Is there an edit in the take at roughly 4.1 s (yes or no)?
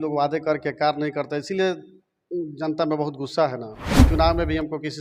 yes